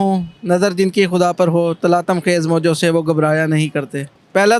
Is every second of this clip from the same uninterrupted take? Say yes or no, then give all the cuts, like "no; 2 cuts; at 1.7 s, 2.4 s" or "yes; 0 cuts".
yes; 0 cuts